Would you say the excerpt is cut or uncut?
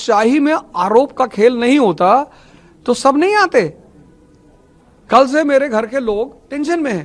uncut